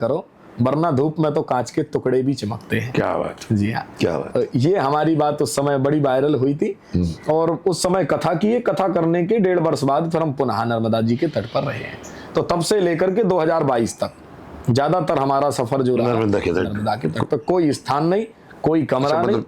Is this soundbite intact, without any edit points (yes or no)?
yes